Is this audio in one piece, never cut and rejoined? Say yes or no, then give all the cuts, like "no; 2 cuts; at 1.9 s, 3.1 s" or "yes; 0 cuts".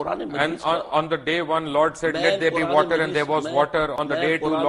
yes; 0 cuts